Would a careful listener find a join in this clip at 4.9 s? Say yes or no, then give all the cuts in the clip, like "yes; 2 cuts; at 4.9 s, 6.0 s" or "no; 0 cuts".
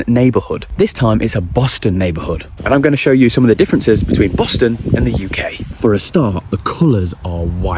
no; 0 cuts